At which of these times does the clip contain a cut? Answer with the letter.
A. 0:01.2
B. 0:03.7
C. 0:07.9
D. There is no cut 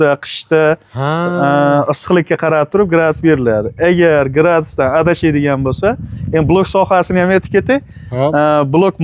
D